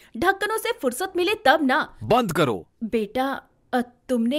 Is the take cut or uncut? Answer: cut